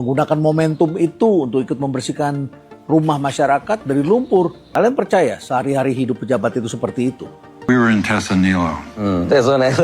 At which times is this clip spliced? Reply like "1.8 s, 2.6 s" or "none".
4.6 s, 7.7 s